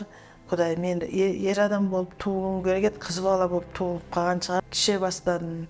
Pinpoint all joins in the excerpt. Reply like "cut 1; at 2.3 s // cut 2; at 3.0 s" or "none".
cut 1; at 4.6 s